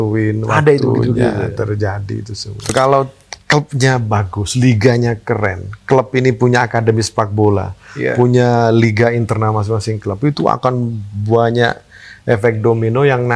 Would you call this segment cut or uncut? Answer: cut